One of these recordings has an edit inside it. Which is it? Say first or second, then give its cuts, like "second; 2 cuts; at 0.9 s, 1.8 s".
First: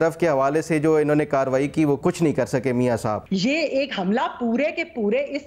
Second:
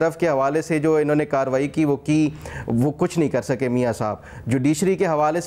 first; 2 cuts; at 2.0 s, 3.2 s